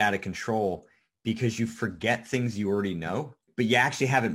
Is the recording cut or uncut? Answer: cut